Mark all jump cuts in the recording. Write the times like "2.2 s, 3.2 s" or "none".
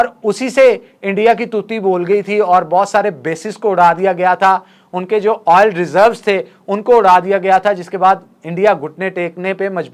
none